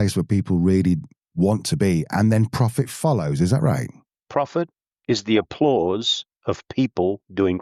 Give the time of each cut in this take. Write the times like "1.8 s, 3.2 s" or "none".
none